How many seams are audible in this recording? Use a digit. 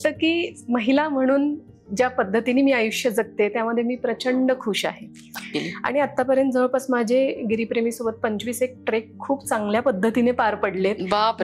1